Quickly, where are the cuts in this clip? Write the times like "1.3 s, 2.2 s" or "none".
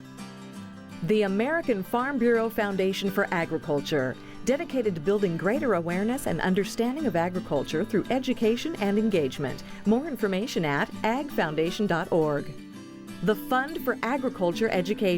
1.0 s